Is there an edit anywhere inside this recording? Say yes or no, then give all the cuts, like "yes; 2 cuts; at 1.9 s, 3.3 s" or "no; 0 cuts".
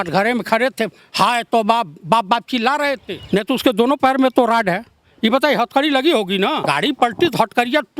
yes; 2 cuts; at 3.1 s, 6.6 s